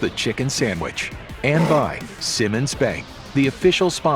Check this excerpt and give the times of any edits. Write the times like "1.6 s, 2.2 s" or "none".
1.4 s